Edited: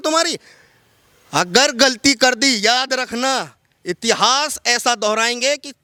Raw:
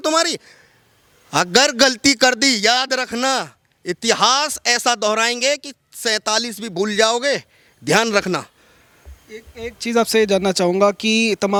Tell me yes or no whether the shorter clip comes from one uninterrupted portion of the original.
yes